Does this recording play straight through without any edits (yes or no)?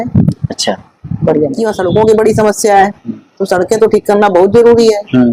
no